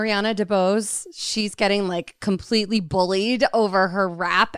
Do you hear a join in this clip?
no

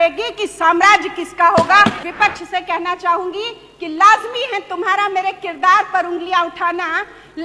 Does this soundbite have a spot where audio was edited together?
yes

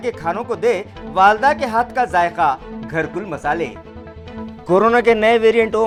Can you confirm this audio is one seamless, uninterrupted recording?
yes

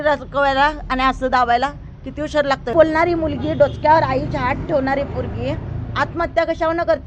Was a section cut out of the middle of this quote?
yes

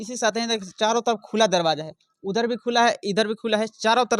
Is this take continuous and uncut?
yes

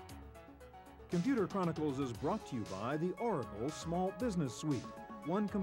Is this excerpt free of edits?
no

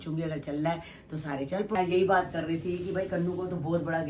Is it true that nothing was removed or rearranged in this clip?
no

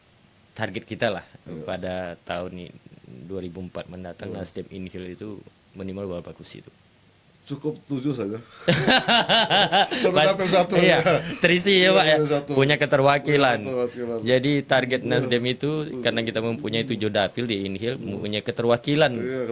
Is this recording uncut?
yes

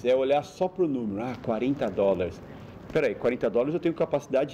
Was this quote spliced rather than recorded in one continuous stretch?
no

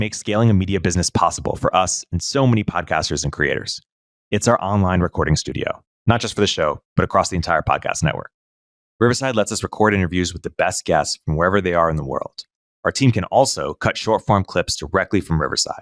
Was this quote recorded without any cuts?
yes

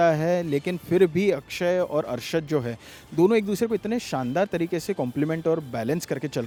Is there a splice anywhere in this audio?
no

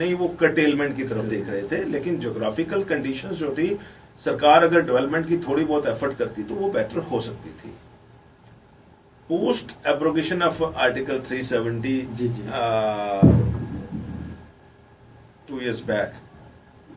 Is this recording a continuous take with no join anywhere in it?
yes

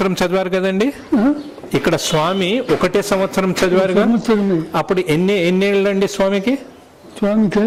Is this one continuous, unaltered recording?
yes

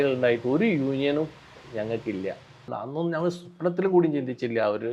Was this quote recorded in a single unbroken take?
no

